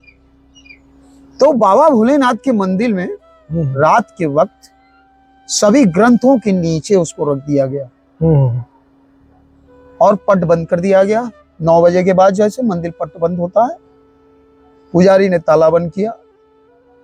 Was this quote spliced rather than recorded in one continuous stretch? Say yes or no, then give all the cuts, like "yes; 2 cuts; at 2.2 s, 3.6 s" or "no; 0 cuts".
no; 0 cuts